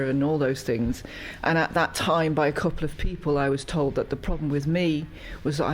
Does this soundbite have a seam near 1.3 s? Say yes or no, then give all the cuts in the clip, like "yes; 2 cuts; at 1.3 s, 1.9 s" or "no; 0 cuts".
yes; 1 cut; at 1.3 s